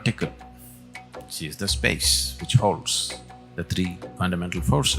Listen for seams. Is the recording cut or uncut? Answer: cut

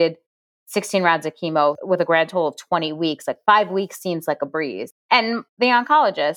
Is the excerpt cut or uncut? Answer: uncut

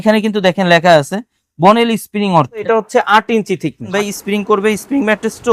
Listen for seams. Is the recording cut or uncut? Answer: cut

